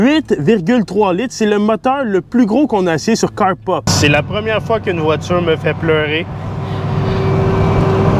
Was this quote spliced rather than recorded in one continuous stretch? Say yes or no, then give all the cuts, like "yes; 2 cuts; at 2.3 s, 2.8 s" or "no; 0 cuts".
yes; 1 cut; at 3.9 s